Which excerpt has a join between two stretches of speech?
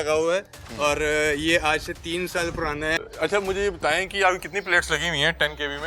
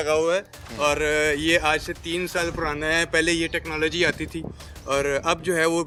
first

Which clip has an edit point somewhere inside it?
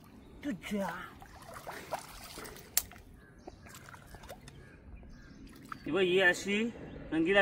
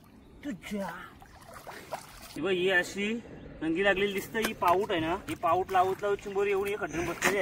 second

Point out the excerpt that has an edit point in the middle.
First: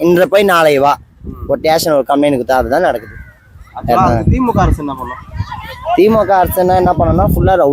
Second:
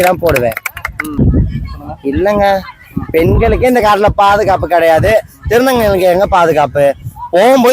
second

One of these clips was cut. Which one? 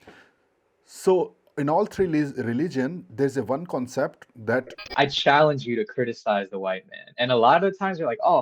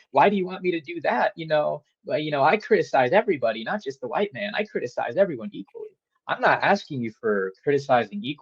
first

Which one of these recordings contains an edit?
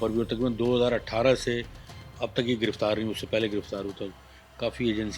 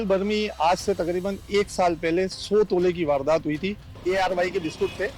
second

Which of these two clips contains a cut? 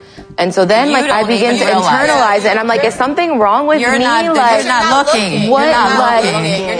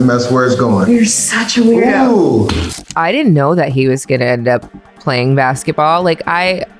second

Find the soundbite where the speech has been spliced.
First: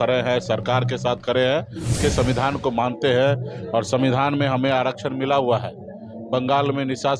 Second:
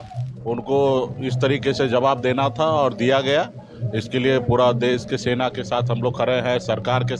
first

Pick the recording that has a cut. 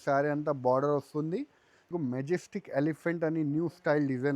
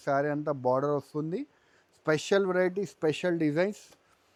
first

